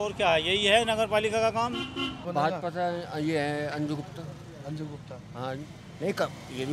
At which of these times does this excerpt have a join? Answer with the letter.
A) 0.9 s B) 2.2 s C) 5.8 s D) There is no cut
B